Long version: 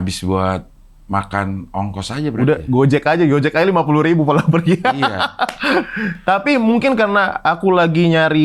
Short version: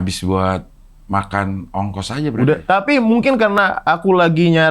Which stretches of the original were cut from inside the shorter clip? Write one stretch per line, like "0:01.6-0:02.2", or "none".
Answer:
0:02.6-0:06.2